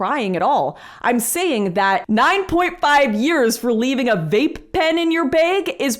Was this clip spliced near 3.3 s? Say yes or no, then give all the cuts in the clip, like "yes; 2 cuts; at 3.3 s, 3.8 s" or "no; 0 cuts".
no; 1 cut; at 2.0 s